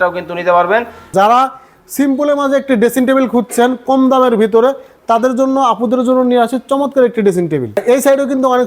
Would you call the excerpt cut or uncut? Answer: cut